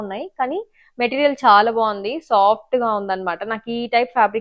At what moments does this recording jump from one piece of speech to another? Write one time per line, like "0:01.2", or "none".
none